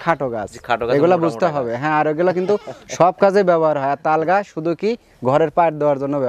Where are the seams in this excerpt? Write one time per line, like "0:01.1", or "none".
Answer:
none